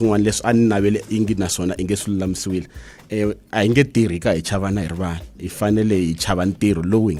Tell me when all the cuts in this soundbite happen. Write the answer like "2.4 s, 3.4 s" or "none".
none